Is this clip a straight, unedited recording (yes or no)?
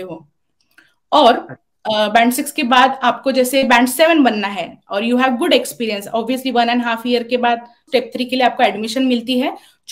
no